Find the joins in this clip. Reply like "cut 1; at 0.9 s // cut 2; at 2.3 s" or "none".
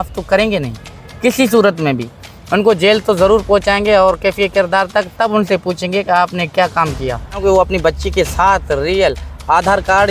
cut 1; at 7.4 s